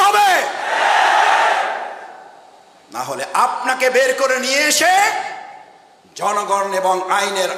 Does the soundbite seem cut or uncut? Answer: uncut